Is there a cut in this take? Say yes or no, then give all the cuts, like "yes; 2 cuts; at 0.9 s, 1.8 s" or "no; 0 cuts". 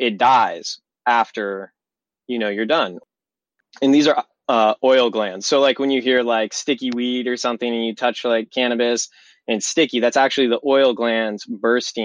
yes; 1 cut; at 3.0 s